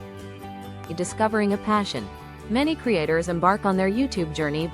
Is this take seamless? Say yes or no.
no